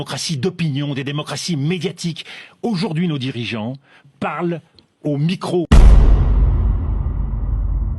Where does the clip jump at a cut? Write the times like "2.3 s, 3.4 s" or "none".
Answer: 5.7 s